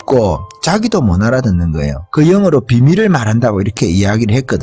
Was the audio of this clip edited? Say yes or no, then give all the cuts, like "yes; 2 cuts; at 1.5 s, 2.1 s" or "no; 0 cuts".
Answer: yes; 2 cuts; at 1.9 s, 3.8 s